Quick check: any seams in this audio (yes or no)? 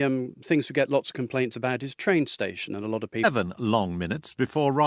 no